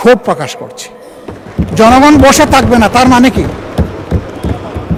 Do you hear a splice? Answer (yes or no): no